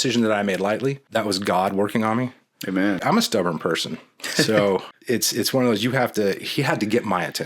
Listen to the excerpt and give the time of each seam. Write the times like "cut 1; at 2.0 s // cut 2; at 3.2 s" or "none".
cut 1; at 1.1 s // cut 2; at 3.0 s // cut 3; at 4.9 s